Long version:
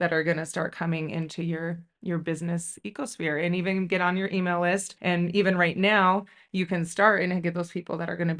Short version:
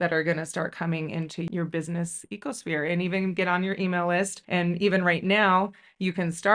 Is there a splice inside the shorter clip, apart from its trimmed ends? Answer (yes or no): yes